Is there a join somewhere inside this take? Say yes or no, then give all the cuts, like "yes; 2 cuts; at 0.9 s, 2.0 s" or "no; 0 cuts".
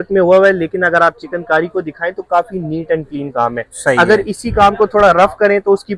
no; 0 cuts